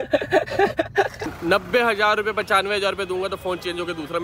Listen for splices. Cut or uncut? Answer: cut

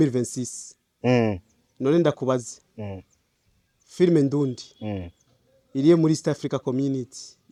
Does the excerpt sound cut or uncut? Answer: uncut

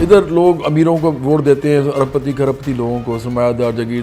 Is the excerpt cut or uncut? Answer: uncut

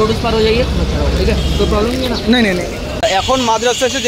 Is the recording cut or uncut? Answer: cut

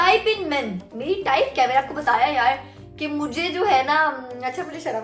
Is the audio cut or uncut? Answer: uncut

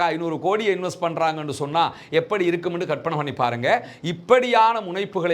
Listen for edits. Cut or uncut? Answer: uncut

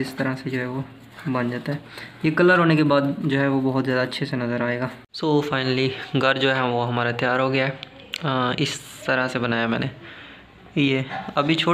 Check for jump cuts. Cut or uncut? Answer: cut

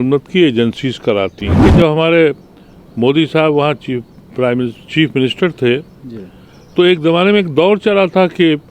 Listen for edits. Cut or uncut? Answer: cut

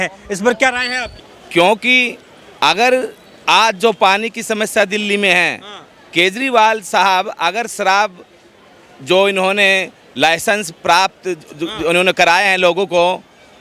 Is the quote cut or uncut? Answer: cut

